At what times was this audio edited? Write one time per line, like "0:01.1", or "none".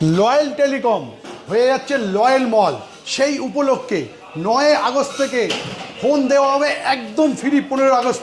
none